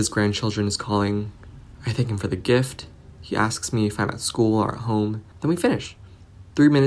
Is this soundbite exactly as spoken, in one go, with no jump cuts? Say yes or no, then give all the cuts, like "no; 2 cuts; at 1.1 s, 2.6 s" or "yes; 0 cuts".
yes; 0 cuts